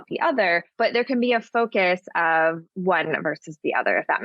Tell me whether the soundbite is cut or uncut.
cut